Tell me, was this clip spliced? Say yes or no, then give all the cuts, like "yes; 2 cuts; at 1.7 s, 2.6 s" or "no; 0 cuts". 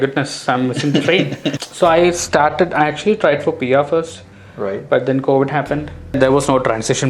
yes; 2 cuts; at 1.5 s, 6.2 s